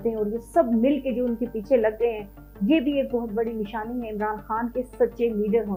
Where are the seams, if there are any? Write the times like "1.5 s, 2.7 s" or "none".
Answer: none